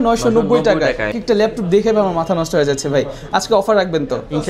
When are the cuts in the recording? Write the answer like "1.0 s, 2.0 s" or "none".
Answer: 1.2 s